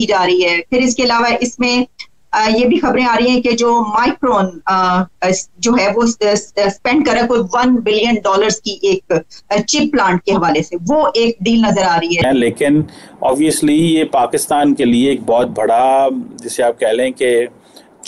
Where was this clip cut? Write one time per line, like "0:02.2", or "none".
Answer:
0:12.2